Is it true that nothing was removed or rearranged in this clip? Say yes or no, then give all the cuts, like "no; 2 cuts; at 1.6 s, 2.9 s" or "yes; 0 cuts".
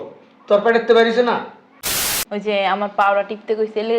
no; 1 cut; at 1.9 s